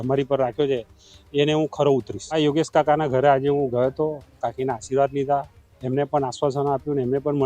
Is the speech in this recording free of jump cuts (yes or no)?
no